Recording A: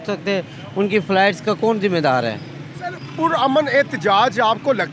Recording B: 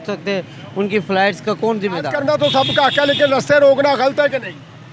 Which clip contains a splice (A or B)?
B